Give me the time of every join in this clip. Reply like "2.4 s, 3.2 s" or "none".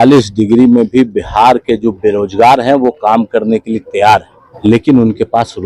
4.4 s